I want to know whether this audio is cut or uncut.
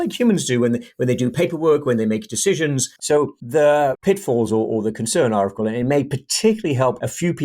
cut